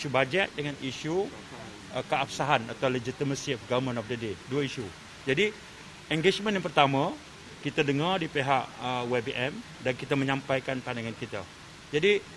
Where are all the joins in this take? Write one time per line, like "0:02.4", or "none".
none